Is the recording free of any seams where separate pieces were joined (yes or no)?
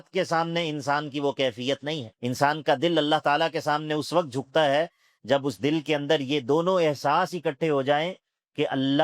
no